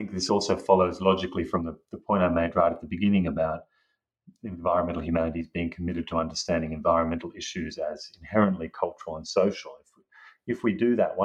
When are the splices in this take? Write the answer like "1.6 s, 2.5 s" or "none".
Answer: none